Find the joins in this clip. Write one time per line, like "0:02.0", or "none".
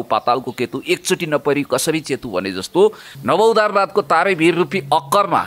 0:03.1